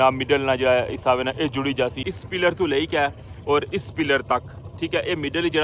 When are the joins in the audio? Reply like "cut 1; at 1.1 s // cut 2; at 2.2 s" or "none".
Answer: cut 1; at 2.1 s

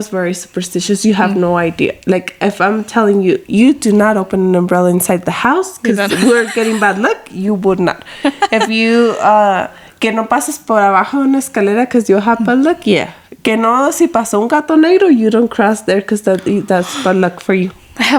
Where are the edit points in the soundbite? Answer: none

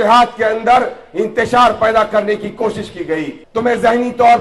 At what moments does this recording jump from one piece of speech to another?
cut 1; at 3.4 s

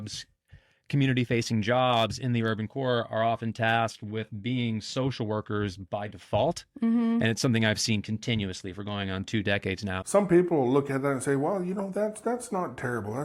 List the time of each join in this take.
cut 1; at 10.0 s

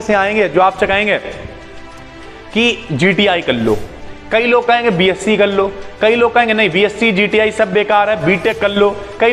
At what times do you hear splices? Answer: none

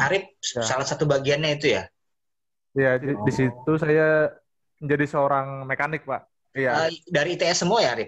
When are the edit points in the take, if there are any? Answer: cut 1; at 3.1 s // cut 2; at 6.4 s

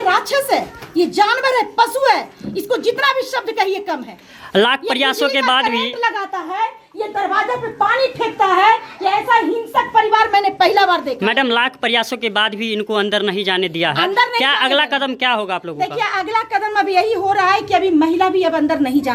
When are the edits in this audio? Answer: none

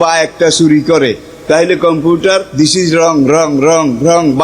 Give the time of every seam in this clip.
cut 1; at 2.5 s

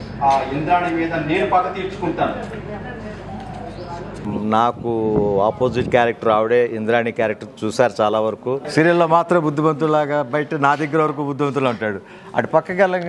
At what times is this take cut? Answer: cut 1; at 4.2 s // cut 2; at 8.7 s

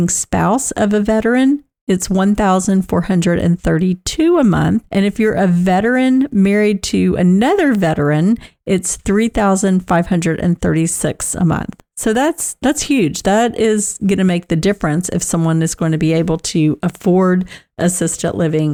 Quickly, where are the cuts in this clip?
none

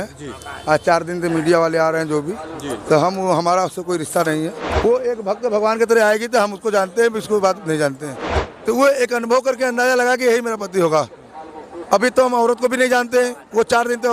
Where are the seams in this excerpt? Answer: cut 1; at 4.6 s // cut 2; at 8.2 s

